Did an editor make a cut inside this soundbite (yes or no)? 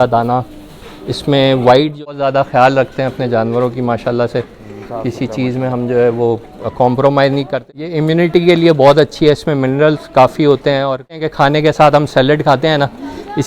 yes